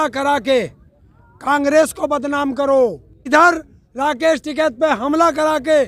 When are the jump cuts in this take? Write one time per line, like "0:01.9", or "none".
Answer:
0:03.3

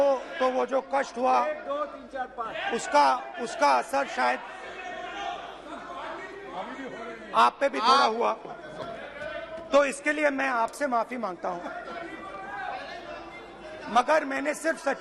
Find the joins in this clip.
none

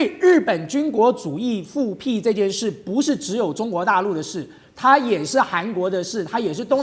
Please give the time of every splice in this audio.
none

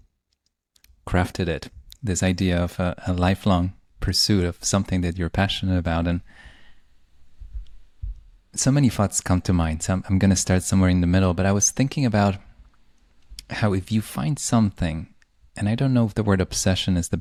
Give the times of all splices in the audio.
none

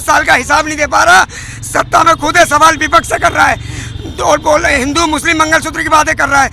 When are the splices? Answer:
none

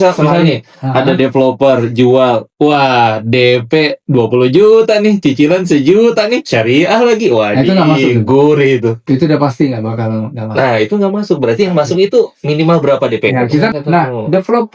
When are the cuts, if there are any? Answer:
0:13.7

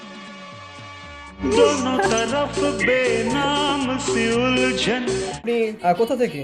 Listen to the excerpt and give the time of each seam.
0:05.4

